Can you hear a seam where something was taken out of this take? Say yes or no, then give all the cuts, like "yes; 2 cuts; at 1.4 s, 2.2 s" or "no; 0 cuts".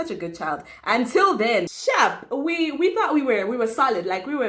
yes; 1 cut; at 1.7 s